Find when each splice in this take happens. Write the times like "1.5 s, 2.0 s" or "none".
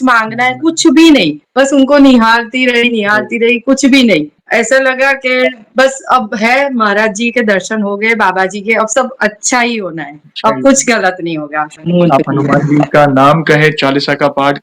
11.7 s